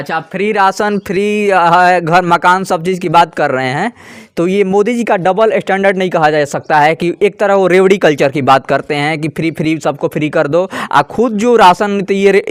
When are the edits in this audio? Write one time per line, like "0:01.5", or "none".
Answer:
none

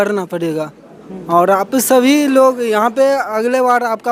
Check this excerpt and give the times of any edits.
none

